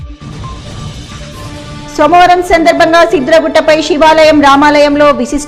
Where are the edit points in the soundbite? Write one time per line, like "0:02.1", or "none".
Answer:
none